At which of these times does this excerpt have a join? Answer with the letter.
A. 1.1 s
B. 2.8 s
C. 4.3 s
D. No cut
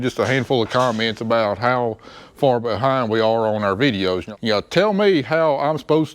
C